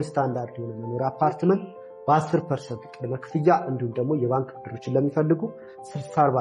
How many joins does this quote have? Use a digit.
0